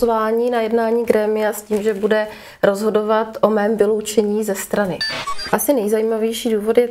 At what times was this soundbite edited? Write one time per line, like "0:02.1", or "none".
0:05.5